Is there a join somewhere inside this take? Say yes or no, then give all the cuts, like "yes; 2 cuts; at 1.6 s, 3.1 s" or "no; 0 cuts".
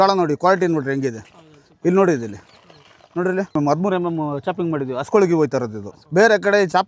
no; 0 cuts